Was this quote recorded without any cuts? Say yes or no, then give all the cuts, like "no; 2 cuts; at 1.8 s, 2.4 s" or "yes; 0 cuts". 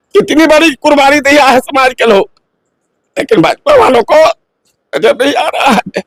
yes; 0 cuts